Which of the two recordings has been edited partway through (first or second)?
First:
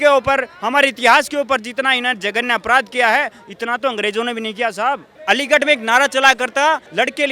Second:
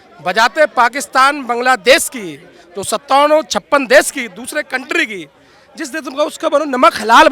first